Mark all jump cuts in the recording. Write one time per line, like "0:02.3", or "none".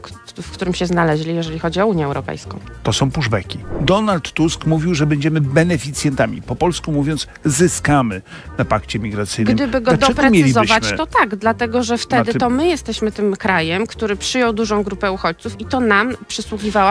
0:03.7